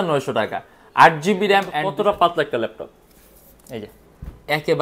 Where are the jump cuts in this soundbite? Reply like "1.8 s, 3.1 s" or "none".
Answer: 1.8 s